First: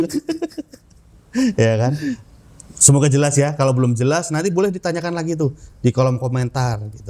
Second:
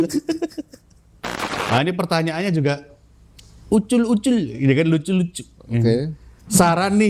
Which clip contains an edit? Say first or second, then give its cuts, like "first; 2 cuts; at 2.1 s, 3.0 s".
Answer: second; 1 cut; at 1.1 s